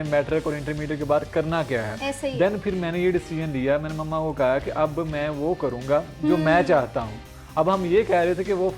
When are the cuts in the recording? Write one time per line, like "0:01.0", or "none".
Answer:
none